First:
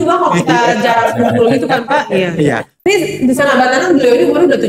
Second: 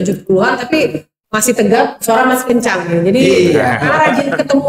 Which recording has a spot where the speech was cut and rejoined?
first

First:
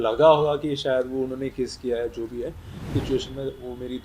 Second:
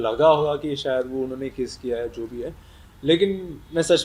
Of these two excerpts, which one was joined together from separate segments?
first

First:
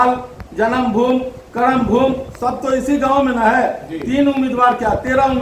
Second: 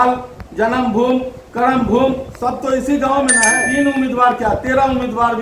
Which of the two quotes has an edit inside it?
second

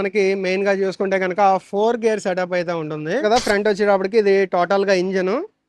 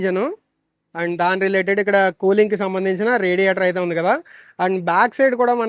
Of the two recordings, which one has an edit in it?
first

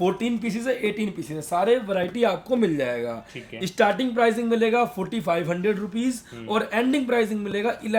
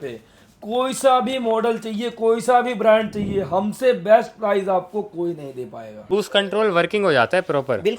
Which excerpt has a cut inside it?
second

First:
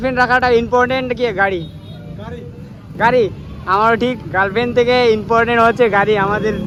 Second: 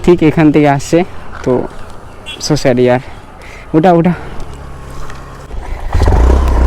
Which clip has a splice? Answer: second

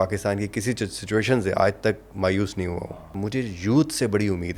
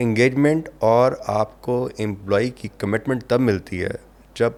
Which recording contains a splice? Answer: first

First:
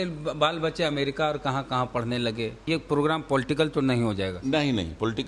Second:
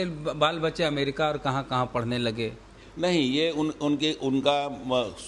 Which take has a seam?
first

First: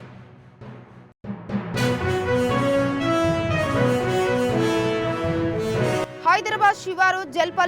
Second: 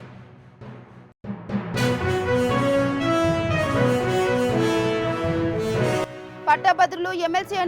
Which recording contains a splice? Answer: second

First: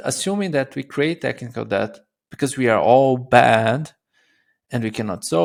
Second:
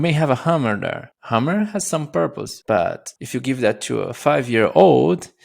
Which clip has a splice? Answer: second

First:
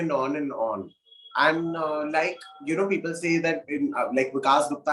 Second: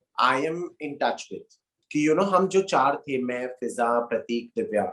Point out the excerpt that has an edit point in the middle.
second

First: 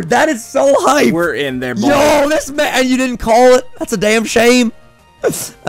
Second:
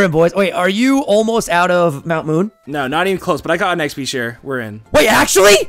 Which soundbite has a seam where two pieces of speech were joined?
second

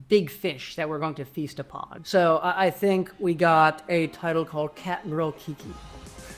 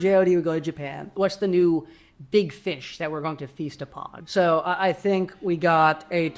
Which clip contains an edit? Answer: second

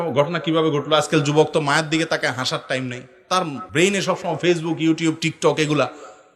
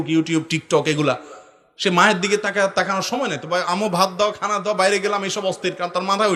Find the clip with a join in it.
first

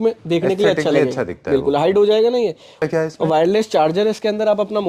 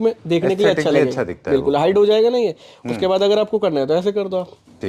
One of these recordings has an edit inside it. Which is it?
first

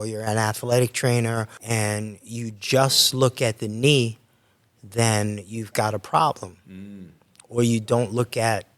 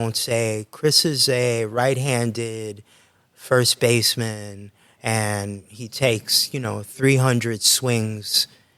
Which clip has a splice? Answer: first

